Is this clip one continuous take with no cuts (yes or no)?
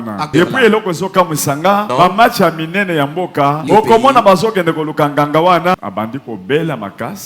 no